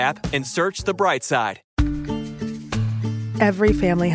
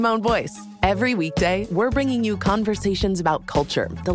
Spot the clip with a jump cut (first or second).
first